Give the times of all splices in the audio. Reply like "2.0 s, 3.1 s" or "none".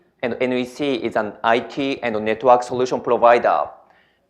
1.6 s

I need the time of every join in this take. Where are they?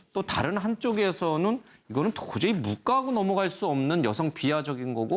3.2 s

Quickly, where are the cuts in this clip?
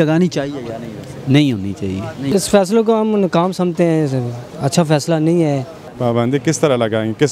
2.3 s, 5.8 s

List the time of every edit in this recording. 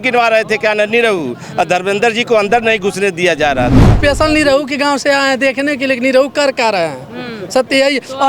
4.0 s

